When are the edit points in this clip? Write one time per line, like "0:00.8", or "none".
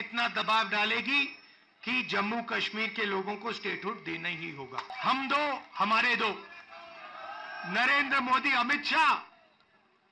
0:04.8